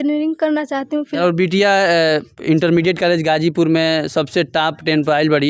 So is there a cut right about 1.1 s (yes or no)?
yes